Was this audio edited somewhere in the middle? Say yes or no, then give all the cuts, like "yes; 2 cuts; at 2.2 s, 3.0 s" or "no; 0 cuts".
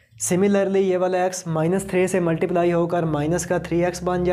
no; 0 cuts